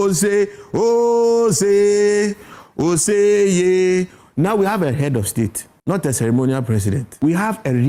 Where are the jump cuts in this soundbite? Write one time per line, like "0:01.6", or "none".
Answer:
0:05.7
0:07.1